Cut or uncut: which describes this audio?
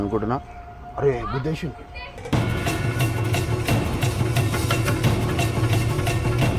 uncut